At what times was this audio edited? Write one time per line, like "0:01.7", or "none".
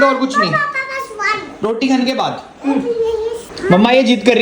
0:03.5